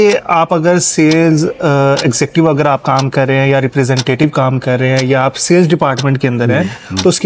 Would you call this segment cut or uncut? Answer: uncut